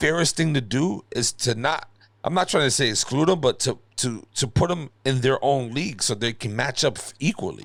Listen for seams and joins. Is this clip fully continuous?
yes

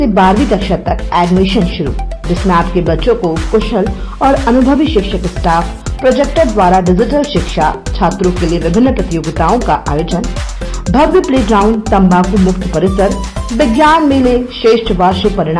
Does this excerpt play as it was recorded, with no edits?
yes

